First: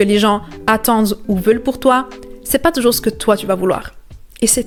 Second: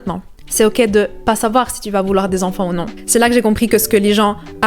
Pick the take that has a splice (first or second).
second